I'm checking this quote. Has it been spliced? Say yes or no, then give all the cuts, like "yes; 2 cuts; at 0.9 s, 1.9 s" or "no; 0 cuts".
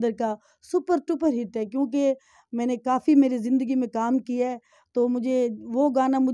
no; 0 cuts